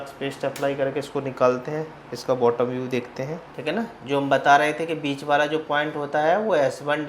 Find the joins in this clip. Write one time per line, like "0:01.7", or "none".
0:03.5